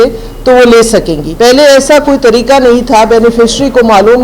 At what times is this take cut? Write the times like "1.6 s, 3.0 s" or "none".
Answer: 1.2 s